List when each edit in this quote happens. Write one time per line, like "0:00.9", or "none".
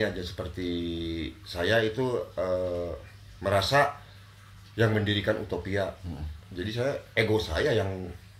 none